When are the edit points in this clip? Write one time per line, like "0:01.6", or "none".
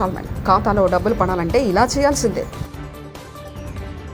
none